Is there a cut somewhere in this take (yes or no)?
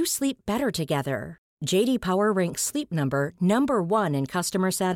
no